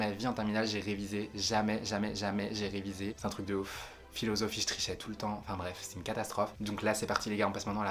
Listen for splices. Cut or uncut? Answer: uncut